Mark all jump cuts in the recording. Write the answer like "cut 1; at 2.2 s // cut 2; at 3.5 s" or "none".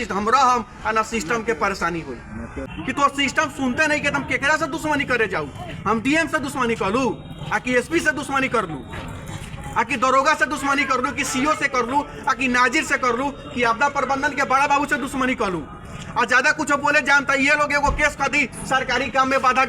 cut 1; at 2.6 s